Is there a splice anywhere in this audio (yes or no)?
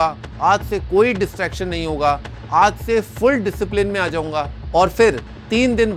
no